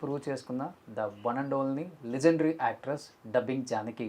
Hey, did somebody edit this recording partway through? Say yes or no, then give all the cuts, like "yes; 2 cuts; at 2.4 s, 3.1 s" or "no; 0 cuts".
no; 0 cuts